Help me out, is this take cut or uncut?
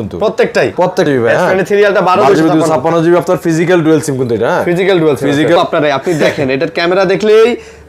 cut